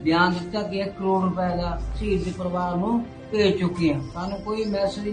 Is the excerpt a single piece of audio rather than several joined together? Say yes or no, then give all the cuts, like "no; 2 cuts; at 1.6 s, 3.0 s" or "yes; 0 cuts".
yes; 0 cuts